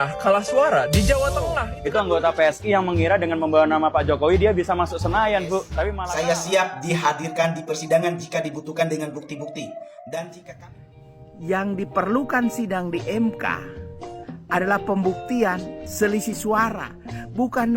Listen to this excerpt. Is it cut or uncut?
cut